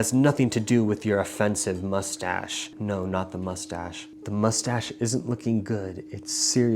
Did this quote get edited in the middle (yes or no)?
yes